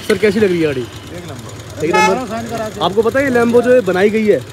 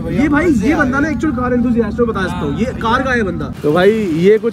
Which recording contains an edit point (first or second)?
second